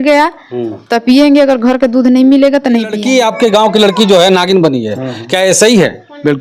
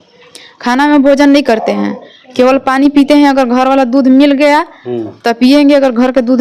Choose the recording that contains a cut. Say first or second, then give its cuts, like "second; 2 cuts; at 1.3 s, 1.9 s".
first; 1 cut; at 3.0 s